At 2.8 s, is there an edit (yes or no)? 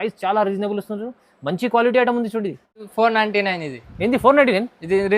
yes